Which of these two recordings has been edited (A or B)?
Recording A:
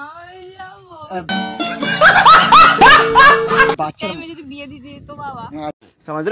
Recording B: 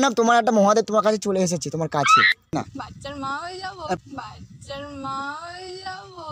B